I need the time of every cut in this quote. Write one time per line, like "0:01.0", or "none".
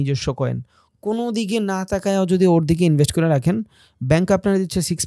none